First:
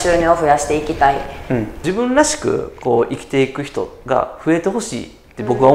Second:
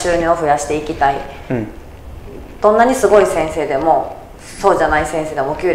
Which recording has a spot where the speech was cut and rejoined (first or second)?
first